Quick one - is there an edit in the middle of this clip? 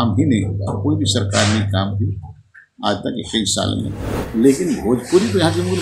yes; 1 cut; at 4.2 s

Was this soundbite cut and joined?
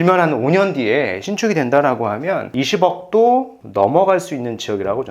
yes; 1 cut; at 2.5 s

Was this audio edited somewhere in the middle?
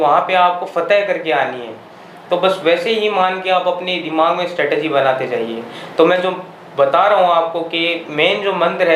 no; 0 cuts

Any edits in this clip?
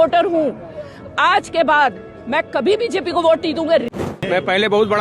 yes; 1 cut; at 3.9 s

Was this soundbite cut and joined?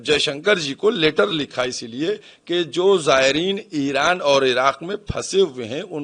no; 0 cuts

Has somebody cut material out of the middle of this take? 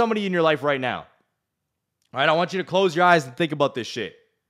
no; 0 cuts

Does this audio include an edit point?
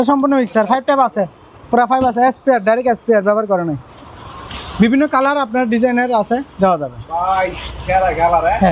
no; 0 cuts

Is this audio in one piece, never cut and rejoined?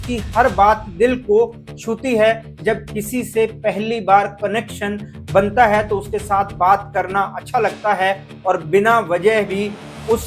yes; 0 cuts

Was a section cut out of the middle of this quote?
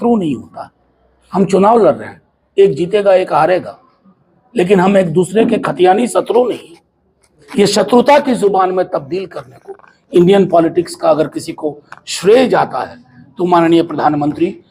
no; 0 cuts

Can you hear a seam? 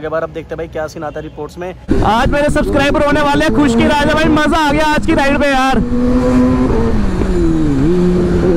yes; 1 cut; at 1.8 s

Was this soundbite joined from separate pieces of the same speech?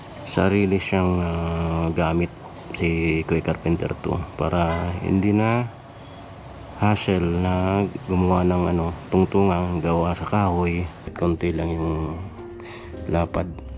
yes; 1 cut; at 11.1 s

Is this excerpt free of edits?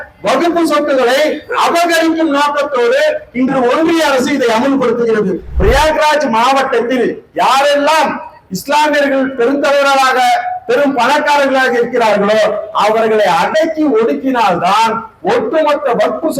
no; 1 cut; at 5.5 s

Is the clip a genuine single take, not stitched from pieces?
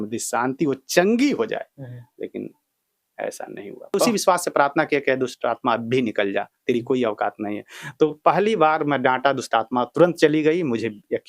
no; 1 cut; at 4.1 s

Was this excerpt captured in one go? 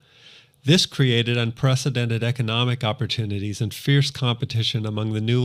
no; 1 cut; at 2.6 s

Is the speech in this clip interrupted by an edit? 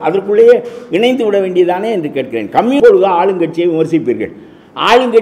yes; 1 cut; at 2.8 s

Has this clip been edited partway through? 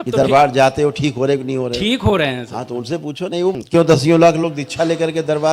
yes; 1 cut; at 3.5 s

